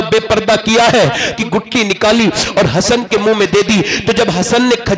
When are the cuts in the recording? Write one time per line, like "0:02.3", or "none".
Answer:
0:01.3